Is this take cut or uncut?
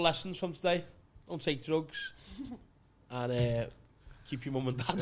uncut